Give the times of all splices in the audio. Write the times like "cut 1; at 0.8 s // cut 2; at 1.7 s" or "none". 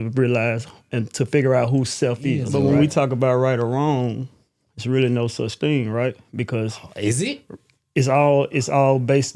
cut 1; at 2.4 s